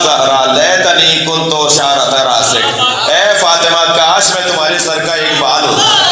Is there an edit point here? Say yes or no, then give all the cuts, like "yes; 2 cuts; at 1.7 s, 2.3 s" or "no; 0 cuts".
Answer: no; 0 cuts